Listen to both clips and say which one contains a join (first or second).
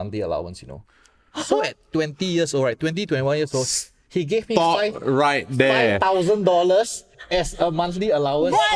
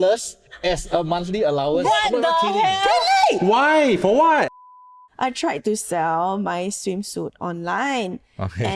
second